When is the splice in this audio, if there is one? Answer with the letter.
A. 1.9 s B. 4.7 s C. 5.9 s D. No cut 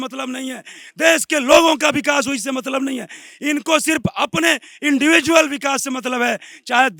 D